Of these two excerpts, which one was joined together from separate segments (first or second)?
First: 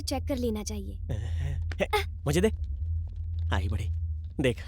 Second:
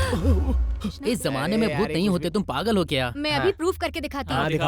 second